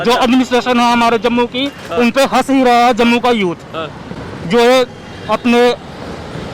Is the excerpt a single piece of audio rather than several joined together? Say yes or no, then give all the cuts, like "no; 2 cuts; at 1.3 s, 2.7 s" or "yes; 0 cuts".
yes; 0 cuts